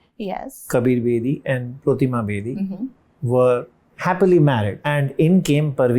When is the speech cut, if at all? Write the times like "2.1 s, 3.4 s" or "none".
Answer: 4.8 s